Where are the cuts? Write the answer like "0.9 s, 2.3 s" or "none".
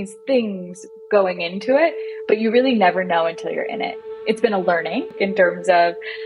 3.9 s, 5.1 s